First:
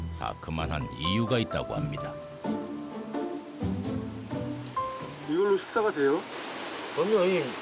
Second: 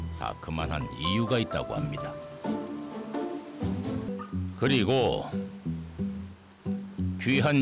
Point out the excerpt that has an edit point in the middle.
second; 1 cut; at 4.1 s

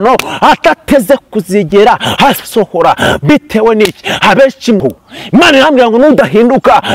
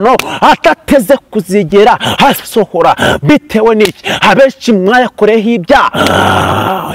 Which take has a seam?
first; 1 cut; at 4.8 s

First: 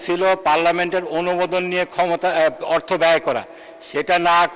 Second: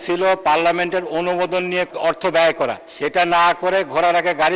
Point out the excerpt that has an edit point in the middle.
second; 2 cuts; at 1.9 s, 2.9 s

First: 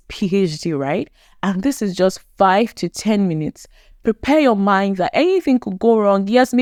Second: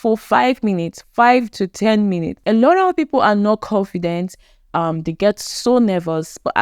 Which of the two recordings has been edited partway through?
second; 1 cut; at 2.3 s

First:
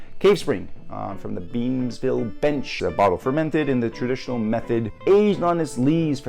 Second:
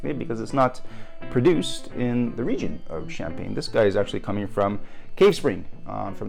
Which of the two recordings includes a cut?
first; 2 cuts; at 2.7 s, 4.9 s

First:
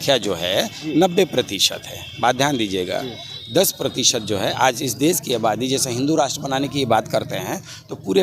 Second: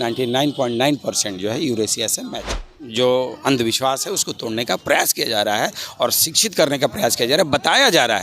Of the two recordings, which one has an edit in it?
second; 1 cut; at 2.5 s

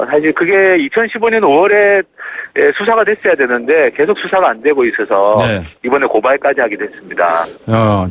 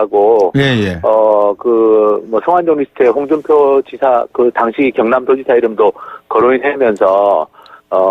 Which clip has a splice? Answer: second; 1 cut; at 3.9 s

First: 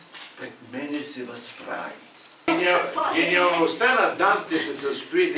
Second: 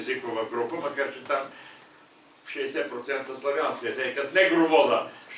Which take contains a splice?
first; 1 cut; at 2.5 s

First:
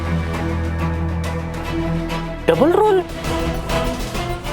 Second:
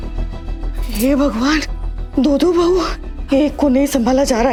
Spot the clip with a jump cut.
first; 2 cuts; at 1.7 s, 3.2 s

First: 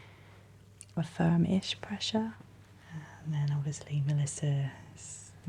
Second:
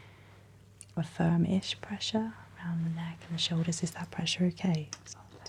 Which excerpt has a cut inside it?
first; 1 cut; at 2.5 s

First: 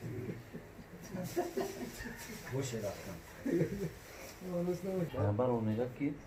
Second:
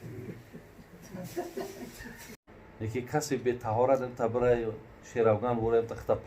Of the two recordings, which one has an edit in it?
second; 1 cut; at 2.3 s

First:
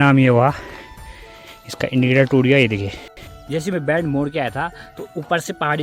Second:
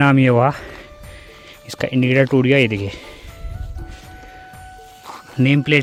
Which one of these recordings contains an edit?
first; 1 cut; at 3.4 s

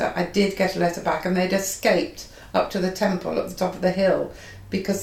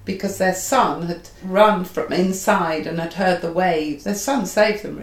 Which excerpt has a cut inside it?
second; 2 cuts; at 1.4 s, 4.0 s

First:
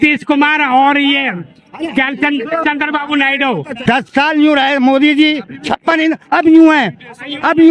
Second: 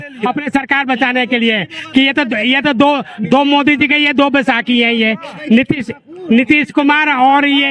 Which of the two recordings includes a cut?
first; 1 cut; at 3.8 s

